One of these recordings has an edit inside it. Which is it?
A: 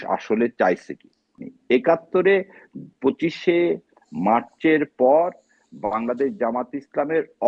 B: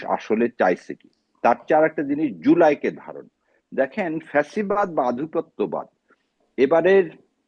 A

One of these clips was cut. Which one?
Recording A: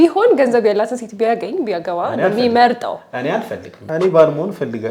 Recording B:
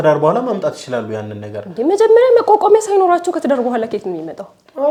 A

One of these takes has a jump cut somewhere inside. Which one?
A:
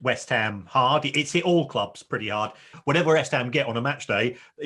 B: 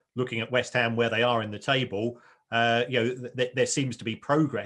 A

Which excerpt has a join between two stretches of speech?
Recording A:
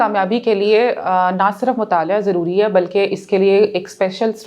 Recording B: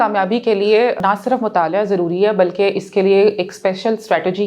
B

